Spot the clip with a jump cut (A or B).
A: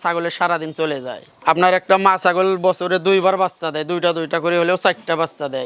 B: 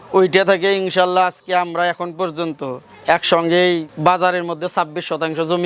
A